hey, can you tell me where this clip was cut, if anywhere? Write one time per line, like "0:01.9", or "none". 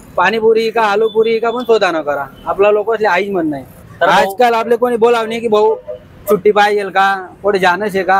0:03.7

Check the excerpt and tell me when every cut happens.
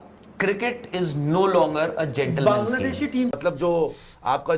0:03.4

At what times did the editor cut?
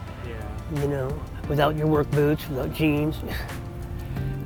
none

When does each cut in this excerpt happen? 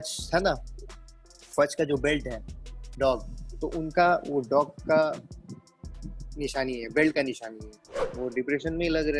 0:08.0

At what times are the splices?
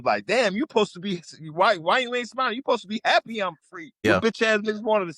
0:04.0

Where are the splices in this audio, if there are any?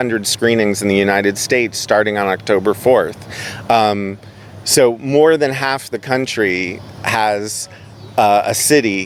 none

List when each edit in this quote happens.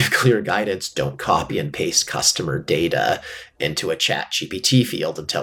none

